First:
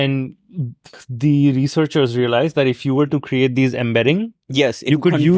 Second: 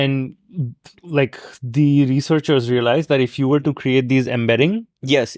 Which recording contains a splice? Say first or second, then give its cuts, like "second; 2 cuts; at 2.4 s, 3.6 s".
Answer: first; 1 cut; at 0.9 s